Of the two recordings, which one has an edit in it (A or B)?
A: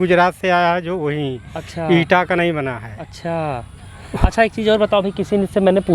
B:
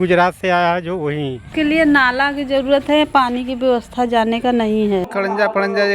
B